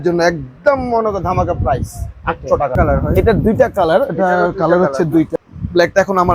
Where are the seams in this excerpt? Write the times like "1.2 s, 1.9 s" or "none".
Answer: 2.7 s, 5.4 s